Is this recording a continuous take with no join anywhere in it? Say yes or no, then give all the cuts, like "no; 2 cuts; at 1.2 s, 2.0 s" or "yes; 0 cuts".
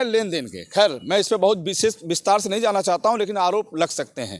yes; 0 cuts